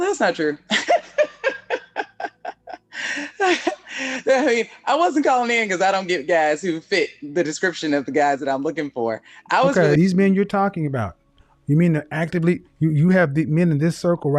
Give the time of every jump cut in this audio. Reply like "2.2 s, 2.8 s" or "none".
9.9 s